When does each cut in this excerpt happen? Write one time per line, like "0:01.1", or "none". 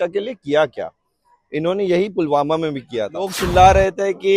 0:03.4

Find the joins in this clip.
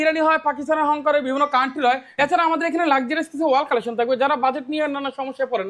0:02.1

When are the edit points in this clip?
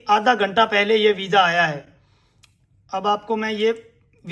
none

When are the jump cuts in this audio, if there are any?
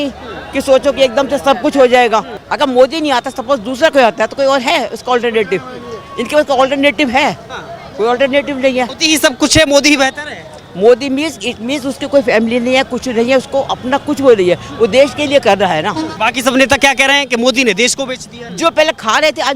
0:02.4
0:08.9
0:16.1
0:18.4

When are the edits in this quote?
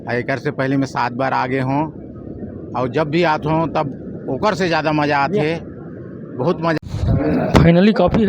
0:06.8

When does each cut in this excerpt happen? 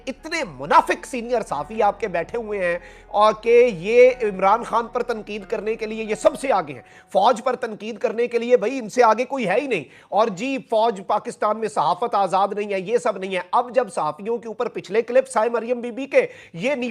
none

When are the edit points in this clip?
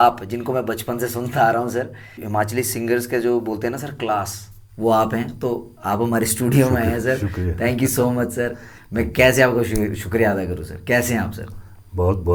none

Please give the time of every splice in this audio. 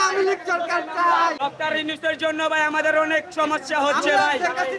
0:01.4

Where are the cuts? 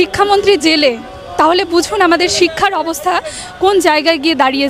none

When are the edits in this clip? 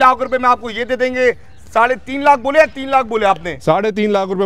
none

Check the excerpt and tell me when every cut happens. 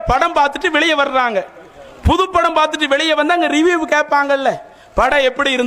none

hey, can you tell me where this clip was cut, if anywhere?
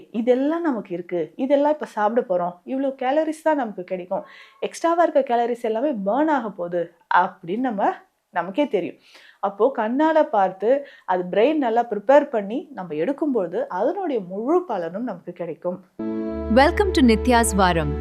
0:15.9

